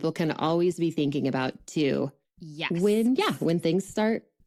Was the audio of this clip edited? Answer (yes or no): no